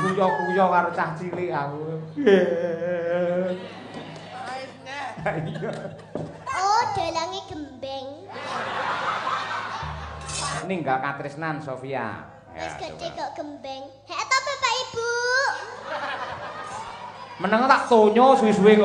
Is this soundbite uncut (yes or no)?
no